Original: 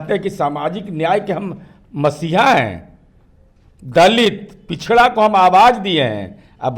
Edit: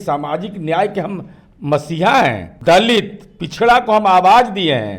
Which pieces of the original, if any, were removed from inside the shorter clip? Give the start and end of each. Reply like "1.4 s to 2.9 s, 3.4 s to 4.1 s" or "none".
2.8 s to 3.8 s